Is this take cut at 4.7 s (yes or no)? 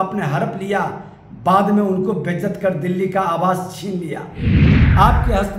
yes